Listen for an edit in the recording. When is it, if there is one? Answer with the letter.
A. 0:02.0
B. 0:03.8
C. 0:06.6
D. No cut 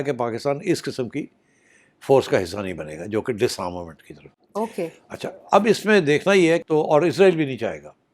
C